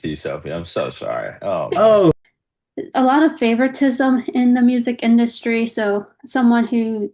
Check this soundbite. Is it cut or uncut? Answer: cut